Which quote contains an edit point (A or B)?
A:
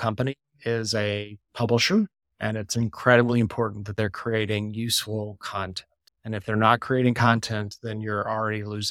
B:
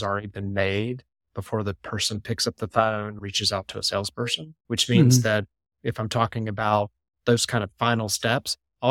B